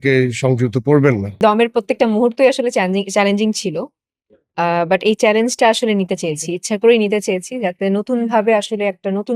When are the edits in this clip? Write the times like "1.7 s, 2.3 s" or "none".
1.4 s